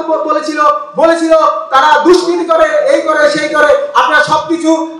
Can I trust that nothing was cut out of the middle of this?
yes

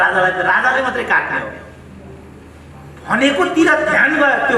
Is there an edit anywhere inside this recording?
no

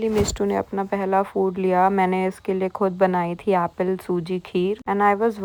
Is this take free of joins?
yes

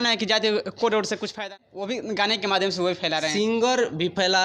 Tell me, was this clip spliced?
yes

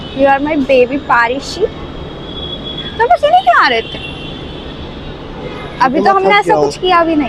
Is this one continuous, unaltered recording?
yes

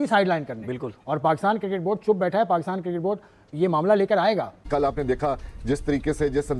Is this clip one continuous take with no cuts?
no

